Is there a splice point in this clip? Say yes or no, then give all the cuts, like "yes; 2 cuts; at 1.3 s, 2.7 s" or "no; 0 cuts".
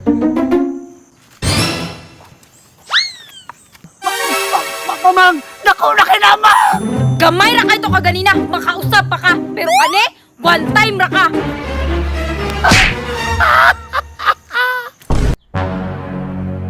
yes; 1 cut; at 15.4 s